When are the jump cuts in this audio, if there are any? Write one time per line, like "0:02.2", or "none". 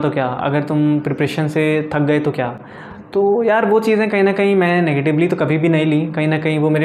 none